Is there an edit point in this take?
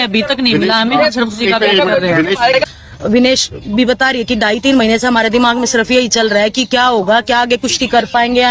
yes; 1 cut; at 2.5 s

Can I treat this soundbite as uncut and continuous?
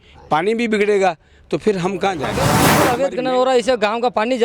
no; 1 cut; at 2.6 s

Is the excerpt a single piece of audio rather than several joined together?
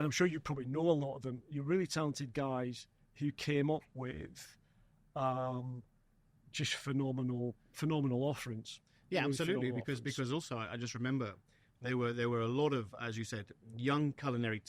yes; 0 cuts

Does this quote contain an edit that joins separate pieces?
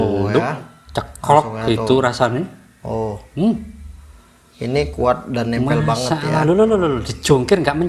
no; 0 cuts

